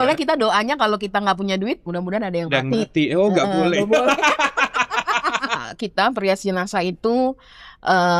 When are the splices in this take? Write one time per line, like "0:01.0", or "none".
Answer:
0:05.7